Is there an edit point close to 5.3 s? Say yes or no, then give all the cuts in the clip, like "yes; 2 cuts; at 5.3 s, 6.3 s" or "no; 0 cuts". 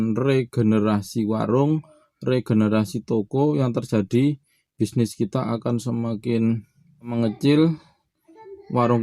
no; 1 cut; at 7.1 s